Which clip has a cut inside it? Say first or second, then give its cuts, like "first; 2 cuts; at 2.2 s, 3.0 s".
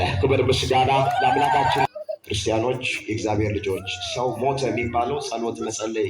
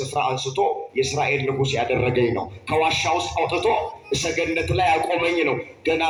first; 1 cut; at 1.9 s